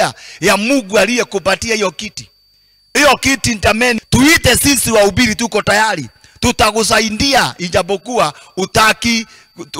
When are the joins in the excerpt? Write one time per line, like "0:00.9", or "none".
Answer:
0:04.0